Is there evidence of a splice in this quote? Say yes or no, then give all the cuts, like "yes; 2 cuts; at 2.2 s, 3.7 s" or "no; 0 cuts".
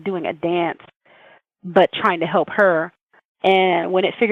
no; 0 cuts